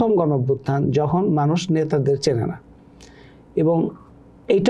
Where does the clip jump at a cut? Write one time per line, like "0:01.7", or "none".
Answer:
none